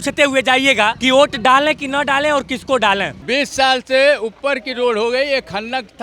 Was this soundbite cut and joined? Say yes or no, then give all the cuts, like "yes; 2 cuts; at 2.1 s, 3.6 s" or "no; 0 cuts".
yes; 2 cuts; at 1.0 s, 3.2 s